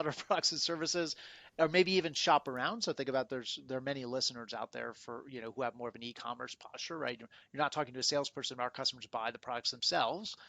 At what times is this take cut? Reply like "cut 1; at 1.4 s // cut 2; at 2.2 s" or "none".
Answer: none